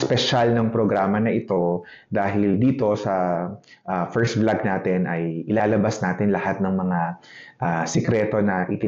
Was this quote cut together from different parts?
no; 0 cuts

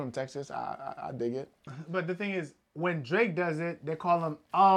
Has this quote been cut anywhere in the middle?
yes; 1 cut; at 1.7 s

